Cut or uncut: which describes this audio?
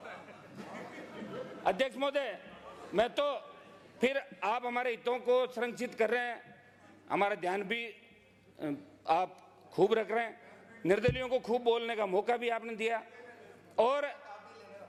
uncut